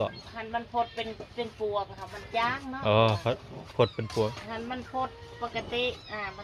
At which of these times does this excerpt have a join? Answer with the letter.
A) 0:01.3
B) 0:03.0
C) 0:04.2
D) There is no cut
D